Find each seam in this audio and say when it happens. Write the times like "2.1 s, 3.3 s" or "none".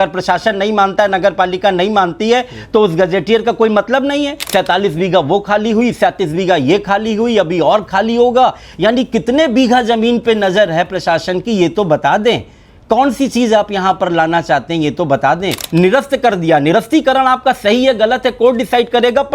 4.5 s, 15.6 s